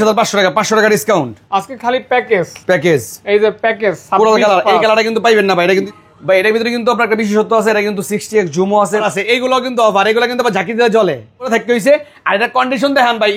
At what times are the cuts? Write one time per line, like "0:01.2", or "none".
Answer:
0:05.9
0:09.1
0:11.5